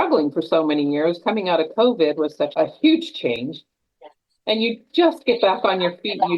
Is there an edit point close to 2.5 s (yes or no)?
yes